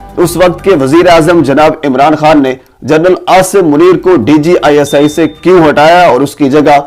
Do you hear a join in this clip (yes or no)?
no